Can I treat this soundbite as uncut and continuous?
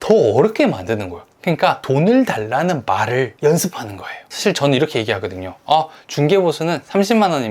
no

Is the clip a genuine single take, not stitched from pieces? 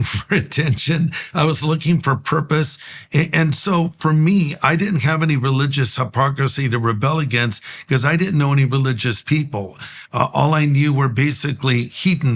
yes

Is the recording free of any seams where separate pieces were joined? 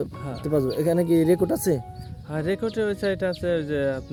yes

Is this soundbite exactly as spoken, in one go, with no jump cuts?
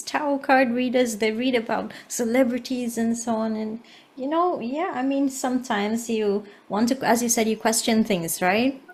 yes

